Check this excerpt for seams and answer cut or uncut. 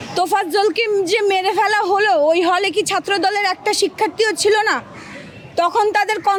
uncut